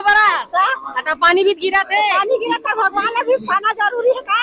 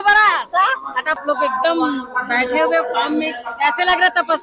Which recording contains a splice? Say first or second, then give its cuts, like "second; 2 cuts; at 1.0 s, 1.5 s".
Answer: second; 1 cut; at 1.1 s